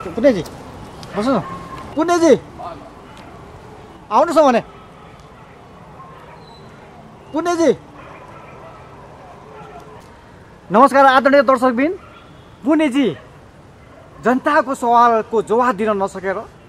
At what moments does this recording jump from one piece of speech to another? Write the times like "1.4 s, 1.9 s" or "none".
1.7 s, 2.5 s